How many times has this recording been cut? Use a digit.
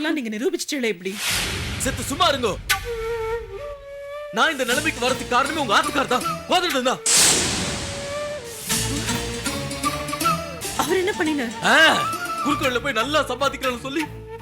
1